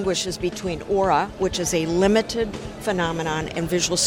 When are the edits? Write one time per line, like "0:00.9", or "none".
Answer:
none